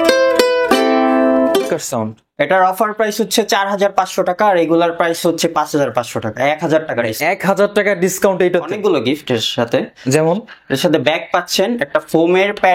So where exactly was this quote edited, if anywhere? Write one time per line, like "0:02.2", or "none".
0:01.6
0:08.7